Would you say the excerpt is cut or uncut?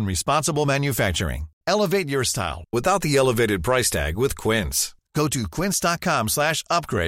uncut